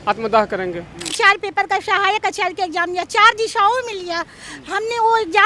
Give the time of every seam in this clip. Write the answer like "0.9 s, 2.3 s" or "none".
1.1 s